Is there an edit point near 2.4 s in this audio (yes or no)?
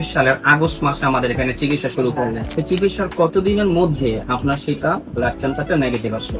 yes